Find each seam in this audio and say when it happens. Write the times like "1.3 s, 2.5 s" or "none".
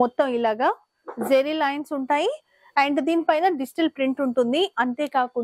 none